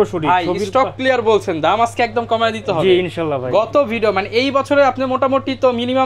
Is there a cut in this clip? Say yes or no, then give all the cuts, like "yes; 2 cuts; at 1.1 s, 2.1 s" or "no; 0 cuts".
no; 0 cuts